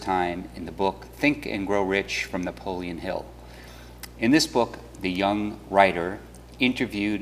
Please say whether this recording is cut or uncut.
cut